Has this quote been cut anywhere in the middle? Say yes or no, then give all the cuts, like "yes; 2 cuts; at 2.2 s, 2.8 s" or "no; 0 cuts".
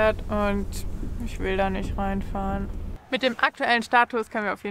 yes; 1 cut; at 3.0 s